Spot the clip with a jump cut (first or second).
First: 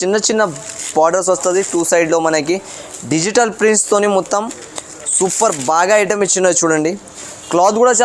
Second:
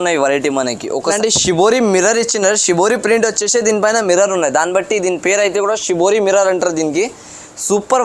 second